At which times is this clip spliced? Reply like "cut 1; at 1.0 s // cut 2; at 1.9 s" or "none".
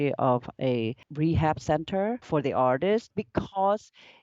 cut 1; at 1.1 s // cut 2; at 2.3 s // cut 3; at 3.1 s